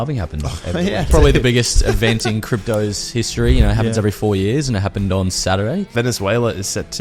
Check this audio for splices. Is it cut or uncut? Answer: cut